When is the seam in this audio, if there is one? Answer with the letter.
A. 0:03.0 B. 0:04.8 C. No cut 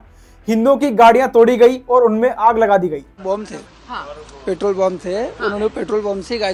C